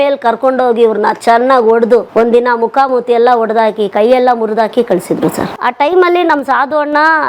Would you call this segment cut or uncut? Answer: cut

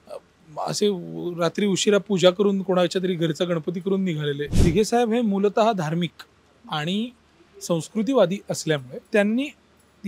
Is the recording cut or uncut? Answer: cut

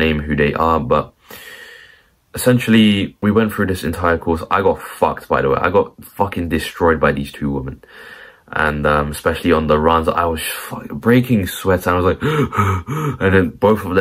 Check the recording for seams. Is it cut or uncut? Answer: cut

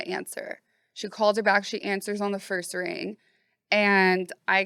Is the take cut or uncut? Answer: uncut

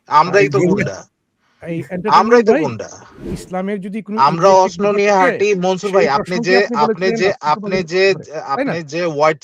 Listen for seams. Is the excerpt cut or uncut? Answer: cut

